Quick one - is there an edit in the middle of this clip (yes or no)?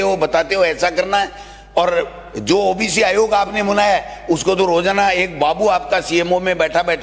no